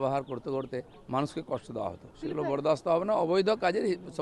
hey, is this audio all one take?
no; 2 cuts; at 0.9 s, 2.1 s

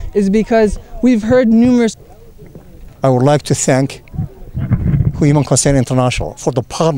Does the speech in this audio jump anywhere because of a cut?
yes; 1 cut; at 2.0 s

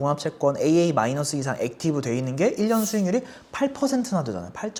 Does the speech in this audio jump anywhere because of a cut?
no; 0 cuts

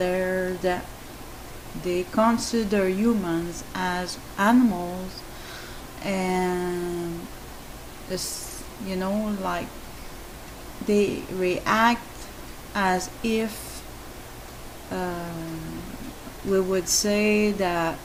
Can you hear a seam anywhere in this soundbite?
no; 0 cuts

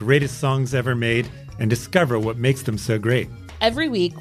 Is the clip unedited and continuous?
yes; 0 cuts

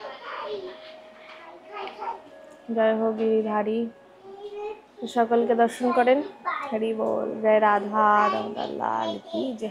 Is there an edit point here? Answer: no; 0 cuts

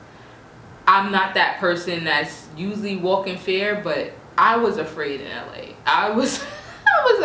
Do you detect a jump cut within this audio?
no; 0 cuts

